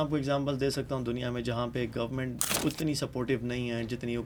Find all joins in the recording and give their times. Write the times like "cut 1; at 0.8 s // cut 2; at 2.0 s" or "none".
none